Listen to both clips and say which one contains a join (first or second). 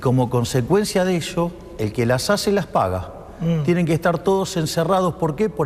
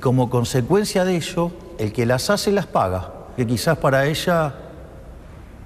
second